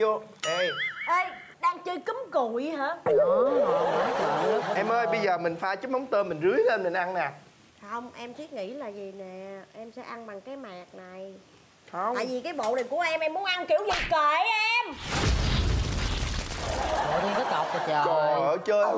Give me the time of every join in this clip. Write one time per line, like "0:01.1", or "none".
none